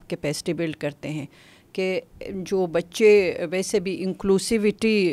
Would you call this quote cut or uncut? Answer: uncut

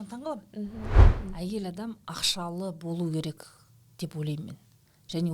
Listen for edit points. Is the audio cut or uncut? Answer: cut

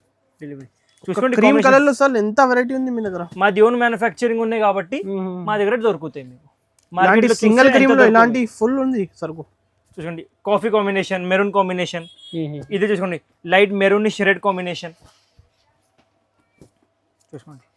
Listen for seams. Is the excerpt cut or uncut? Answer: uncut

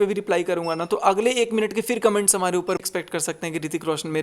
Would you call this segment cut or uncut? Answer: cut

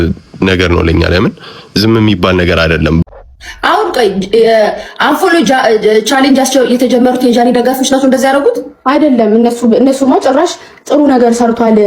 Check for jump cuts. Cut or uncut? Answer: cut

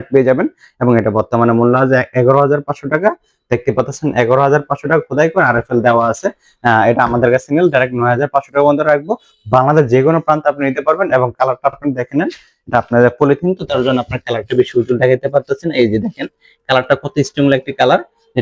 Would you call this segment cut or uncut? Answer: uncut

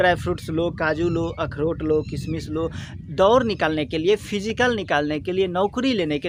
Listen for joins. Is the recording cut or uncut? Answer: uncut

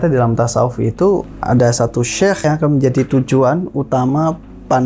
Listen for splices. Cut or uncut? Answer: cut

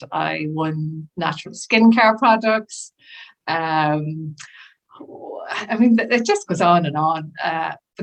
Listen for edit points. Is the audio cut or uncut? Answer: uncut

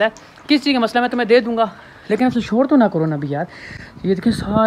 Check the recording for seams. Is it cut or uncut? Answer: uncut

